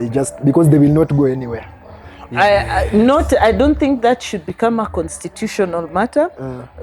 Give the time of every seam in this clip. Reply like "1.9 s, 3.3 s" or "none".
none